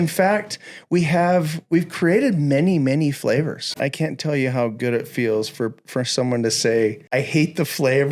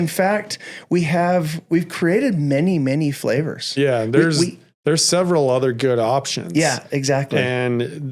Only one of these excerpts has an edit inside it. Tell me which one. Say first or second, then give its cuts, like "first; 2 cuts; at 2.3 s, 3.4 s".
first; 2 cuts; at 3.7 s, 7.0 s